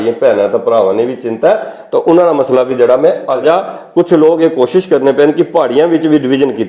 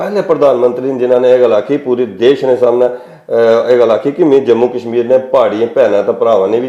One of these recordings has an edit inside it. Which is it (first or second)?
first